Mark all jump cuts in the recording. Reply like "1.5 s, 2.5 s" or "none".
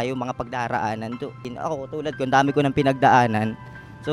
1.5 s